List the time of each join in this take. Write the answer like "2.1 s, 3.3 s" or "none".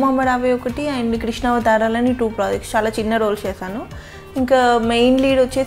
none